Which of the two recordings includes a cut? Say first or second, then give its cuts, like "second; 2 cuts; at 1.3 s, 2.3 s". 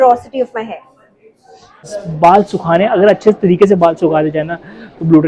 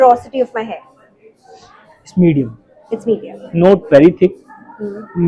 first; 1 cut; at 2.0 s